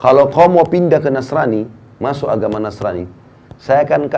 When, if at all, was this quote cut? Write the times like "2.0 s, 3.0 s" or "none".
none